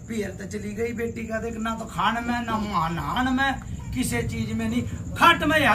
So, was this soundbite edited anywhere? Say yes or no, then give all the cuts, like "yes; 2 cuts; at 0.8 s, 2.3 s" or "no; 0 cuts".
no; 0 cuts